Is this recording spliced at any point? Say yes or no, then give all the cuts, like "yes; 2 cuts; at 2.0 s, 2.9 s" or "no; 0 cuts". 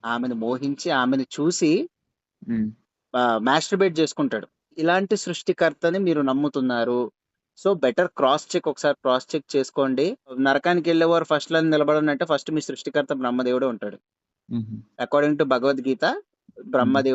yes; 2 cuts; at 4.8 s, 10.4 s